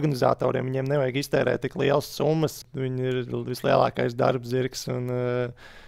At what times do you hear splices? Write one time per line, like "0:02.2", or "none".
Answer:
0:02.6